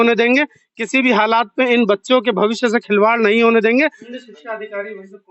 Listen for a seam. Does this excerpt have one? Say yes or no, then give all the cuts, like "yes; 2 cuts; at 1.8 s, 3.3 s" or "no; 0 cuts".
yes; 1 cut; at 4.1 s